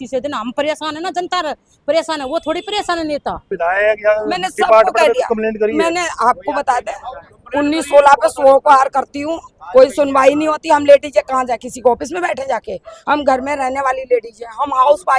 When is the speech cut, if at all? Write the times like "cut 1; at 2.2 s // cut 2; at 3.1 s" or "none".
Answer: cut 1; at 3.5 s